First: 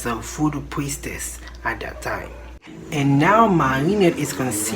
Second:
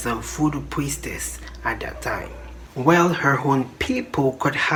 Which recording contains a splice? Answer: first; 1 cut; at 2.7 s

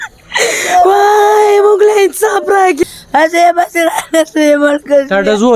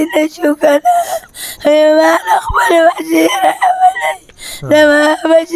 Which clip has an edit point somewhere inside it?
first; 1 cut; at 2.8 s

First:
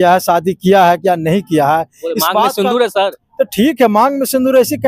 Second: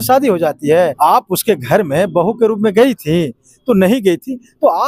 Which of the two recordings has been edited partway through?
second; 1 cut; at 1.0 s

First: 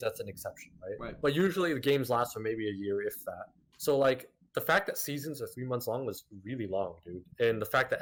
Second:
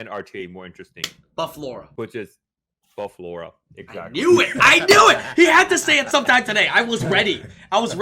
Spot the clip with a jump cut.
second; 1 cut; at 1.9 s

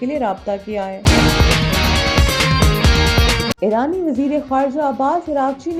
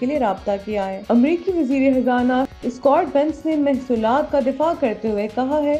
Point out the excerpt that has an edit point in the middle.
first; 2 cuts; at 1.0 s, 3.5 s

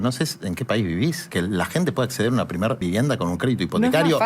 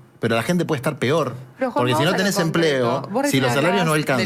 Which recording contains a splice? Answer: first; 2 cuts; at 1.2 s, 2.8 s

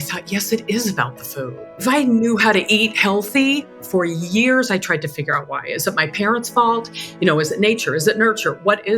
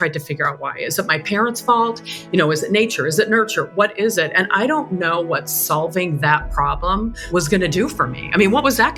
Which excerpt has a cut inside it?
first; 2 cuts; at 1.7 s, 3.8 s

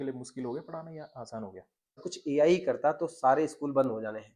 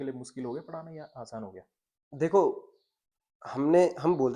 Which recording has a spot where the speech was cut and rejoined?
first; 1 cut; at 2.1 s

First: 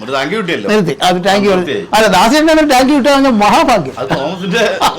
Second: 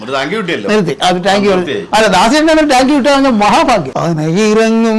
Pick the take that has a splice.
second; 1 cut; at 3.9 s

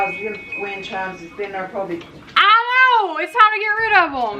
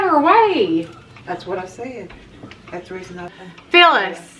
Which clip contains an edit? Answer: second; 2 cuts; at 1.1 s, 3.3 s

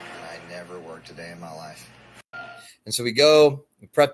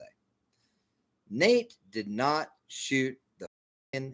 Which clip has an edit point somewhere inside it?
first; 1 cut; at 2.5 s

